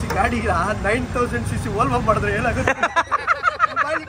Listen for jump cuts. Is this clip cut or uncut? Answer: uncut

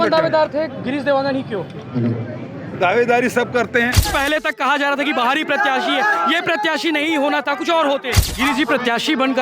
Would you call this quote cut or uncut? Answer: cut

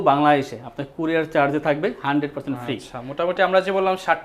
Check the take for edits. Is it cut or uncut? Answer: uncut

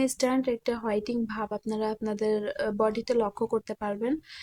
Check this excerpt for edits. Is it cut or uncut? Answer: uncut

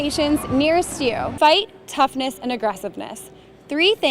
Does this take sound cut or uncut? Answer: cut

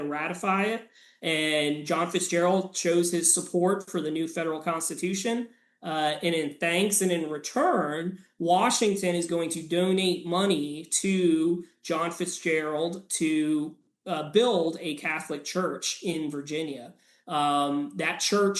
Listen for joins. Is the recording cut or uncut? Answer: uncut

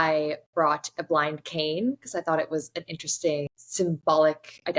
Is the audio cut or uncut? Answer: cut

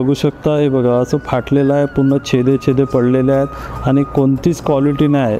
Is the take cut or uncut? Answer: uncut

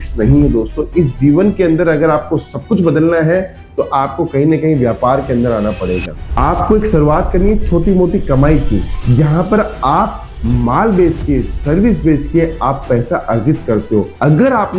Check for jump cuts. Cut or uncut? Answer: cut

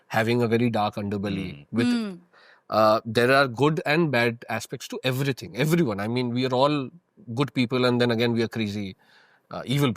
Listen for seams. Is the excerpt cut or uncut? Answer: uncut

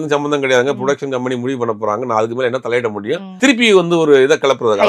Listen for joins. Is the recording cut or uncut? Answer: cut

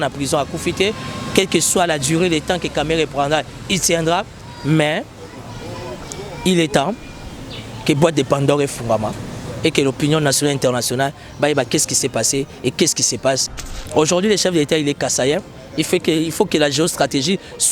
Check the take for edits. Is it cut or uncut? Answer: cut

